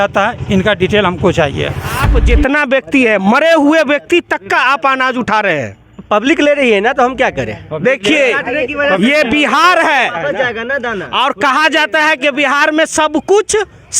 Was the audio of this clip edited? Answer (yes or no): yes